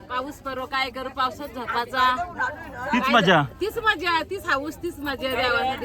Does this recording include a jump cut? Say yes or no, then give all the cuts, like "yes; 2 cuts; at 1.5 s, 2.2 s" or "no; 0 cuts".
no; 0 cuts